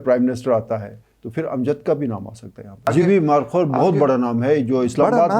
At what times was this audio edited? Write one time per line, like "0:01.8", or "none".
0:02.9

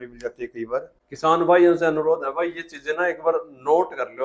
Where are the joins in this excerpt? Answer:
0:01.0

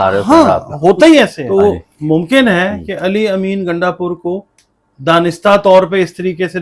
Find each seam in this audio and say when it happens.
0:01.4

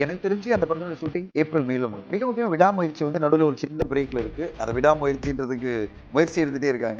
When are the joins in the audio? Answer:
0:01.3
0:02.0

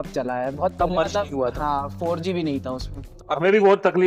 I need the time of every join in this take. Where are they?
0:03.1

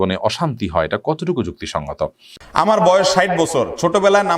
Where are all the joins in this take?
0:02.3

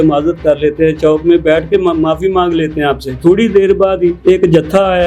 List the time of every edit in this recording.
0:03.1
0:04.2

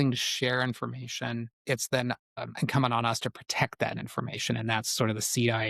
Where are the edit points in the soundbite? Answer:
0:01.5
0:02.3

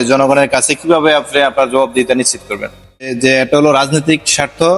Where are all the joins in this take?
0:03.4

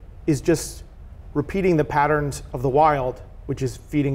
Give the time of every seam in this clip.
none

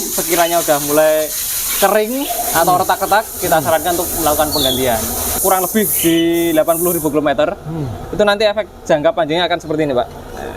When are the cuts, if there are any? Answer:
0:05.3

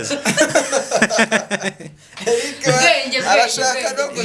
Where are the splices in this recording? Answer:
none

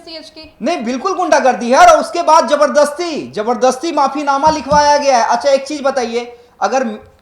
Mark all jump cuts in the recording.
none

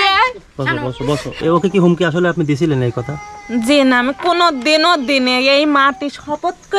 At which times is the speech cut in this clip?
0:01.3

